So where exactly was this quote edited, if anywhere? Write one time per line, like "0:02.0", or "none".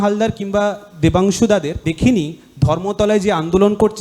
0:01.8